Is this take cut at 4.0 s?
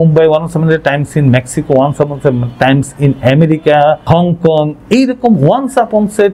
yes; 1 cut; at 4.0 s

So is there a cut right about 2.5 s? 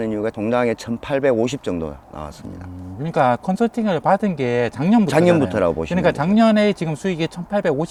no; 0 cuts

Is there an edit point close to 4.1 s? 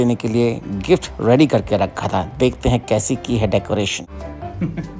yes; 1 cut; at 4.1 s

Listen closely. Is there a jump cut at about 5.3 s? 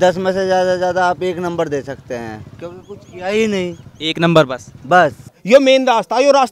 yes; 1 cut; at 5.3 s

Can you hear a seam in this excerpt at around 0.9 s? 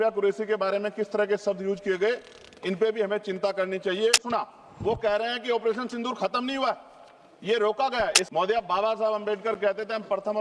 no; 2 cuts; at 4.2 s, 8.2 s

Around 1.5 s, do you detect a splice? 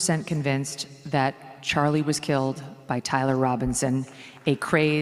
no; 0 cuts

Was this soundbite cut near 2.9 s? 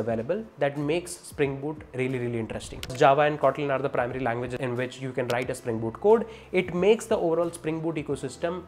yes; 2 cuts; at 2.9 s, 4.6 s

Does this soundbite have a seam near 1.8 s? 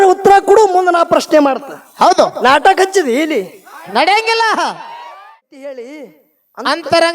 no; 1 cut; at 5.2 s

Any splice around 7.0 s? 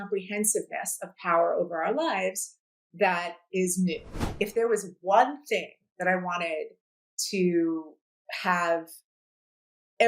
no; 1 cut; at 4.2 s

